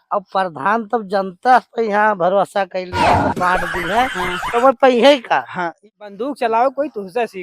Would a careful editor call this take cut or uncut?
cut